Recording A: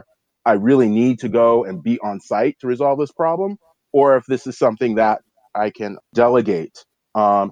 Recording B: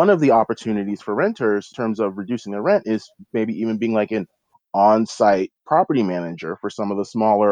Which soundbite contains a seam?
B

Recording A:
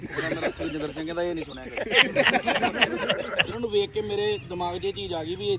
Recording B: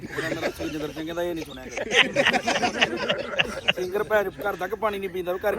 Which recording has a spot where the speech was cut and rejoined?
A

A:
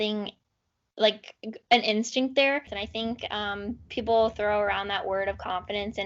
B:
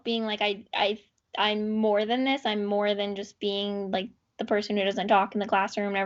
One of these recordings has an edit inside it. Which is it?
A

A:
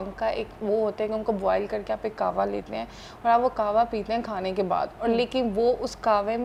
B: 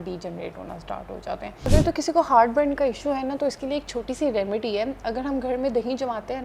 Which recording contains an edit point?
B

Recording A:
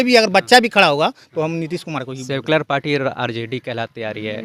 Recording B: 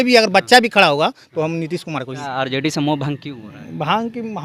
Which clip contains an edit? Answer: B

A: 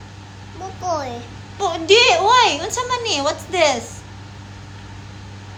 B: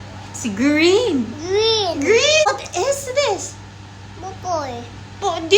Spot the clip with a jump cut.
B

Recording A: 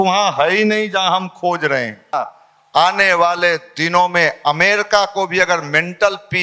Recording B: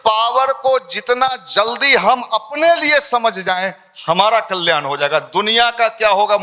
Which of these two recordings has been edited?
A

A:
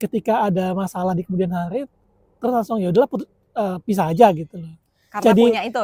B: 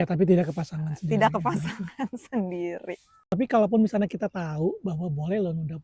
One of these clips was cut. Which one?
B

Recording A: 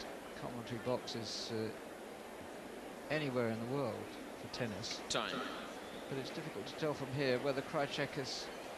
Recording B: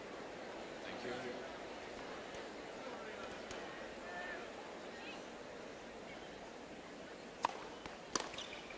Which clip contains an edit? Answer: A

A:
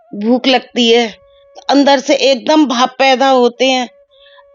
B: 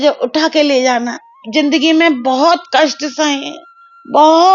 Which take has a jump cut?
B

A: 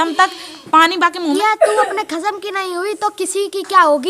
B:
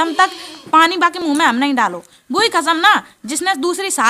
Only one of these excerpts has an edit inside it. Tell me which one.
A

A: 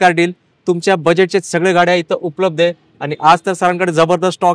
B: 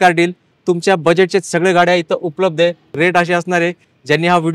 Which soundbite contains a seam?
B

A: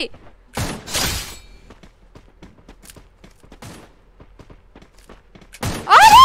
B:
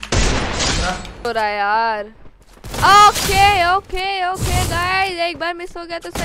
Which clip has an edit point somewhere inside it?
B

